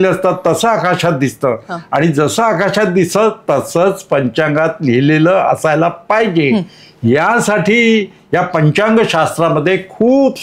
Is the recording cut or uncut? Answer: uncut